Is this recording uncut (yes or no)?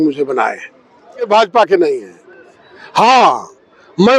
no